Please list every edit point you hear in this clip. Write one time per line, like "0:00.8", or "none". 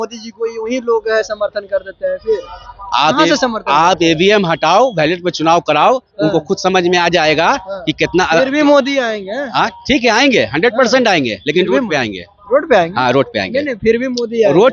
none